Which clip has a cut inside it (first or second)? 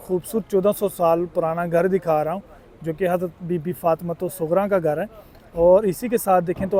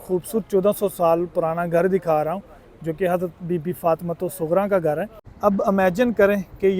second